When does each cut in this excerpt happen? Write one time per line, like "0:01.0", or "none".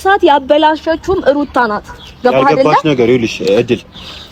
none